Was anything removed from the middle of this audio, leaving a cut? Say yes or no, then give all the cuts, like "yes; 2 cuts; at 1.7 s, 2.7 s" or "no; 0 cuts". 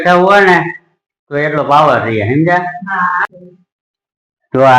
yes; 1 cut; at 3.2 s